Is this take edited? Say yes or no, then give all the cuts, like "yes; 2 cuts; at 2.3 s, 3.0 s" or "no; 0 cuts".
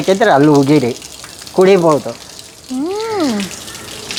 no; 0 cuts